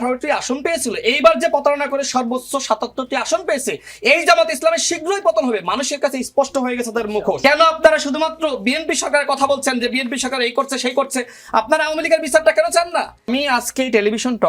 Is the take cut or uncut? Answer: cut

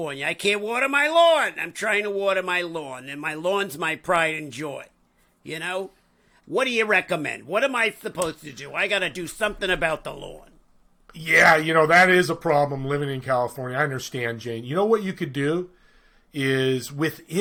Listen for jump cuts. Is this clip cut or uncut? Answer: uncut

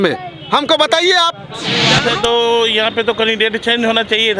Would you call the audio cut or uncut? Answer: cut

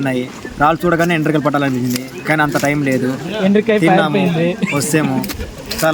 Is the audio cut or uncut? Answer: uncut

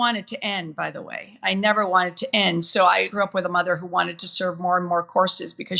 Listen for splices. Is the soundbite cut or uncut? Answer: cut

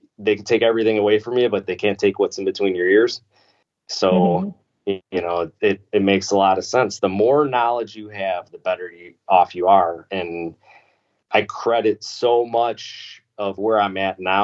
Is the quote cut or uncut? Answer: uncut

